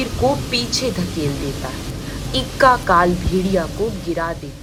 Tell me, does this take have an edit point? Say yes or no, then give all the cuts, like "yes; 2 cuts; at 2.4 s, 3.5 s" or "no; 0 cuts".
no; 0 cuts